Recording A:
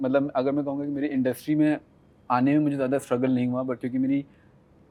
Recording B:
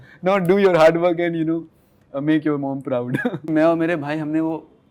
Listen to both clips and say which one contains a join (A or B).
B